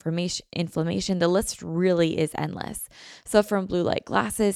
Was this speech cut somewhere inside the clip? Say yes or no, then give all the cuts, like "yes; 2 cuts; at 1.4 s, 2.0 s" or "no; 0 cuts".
no; 0 cuts